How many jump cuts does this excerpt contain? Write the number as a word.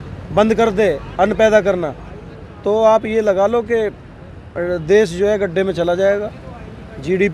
zero